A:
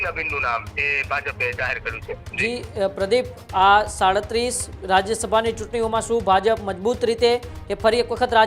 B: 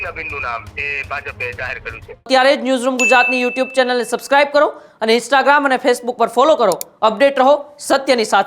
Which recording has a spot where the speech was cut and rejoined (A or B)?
B